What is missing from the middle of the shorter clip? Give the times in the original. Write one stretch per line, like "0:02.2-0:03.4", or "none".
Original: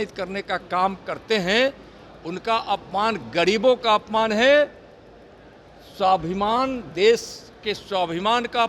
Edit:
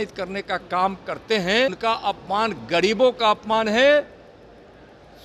0:01.8-0:02.4